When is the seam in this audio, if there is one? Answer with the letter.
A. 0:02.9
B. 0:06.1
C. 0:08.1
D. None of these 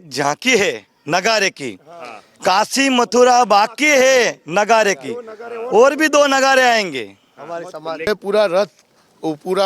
C